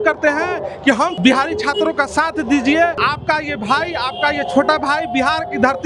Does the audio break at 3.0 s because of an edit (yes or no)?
yes